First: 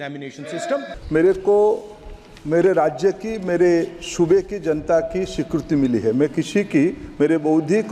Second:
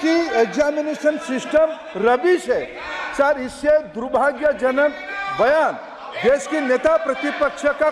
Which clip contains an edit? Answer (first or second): first